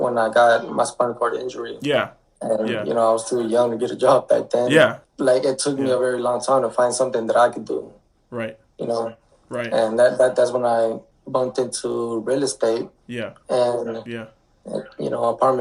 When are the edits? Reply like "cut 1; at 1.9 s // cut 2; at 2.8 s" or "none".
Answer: none